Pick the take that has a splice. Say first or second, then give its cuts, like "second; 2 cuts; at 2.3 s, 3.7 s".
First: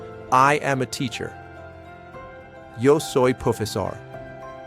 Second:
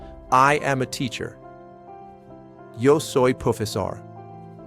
second; 3 cuts; at 1.3 s, 2.8 s, 4.0 s